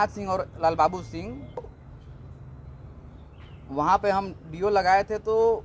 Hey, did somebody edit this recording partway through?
yes; 1 cut; at 1.7 s

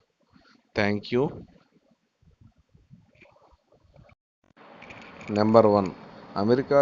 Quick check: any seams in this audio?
yes; 1 cut; at 4.3 s

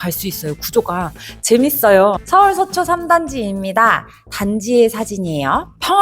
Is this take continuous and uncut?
no; 1 cut; at 2.2 s

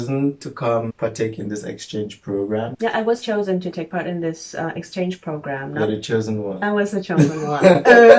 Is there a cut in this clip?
no; 0 cuts

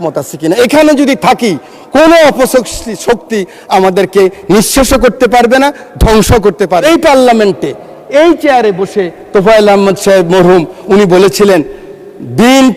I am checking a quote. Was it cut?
yes; 1 cut; at 6.8 s

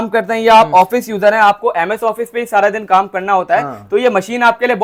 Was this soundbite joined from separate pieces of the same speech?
no; 0 cuts

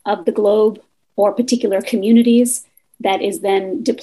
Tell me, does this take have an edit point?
no; 0 cuts

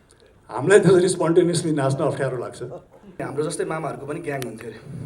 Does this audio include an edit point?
yes; 1 cut; at 3.2 s

